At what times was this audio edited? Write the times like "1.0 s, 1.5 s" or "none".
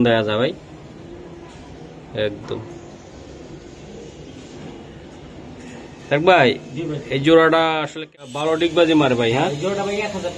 7.9 s